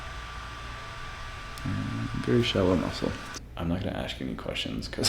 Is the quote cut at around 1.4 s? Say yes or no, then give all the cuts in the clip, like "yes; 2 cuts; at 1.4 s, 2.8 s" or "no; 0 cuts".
no; 1 cut; at 3.3 s